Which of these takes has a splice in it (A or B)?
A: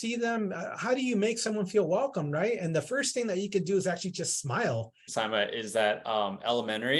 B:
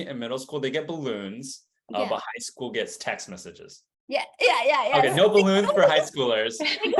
A